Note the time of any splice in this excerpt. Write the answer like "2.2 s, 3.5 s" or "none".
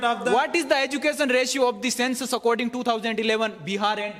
none